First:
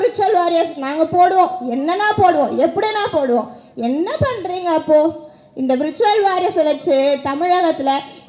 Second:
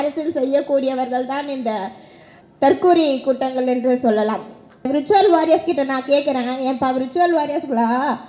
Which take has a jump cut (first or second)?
second